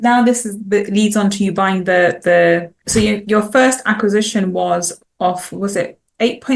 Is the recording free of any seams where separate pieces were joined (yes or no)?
no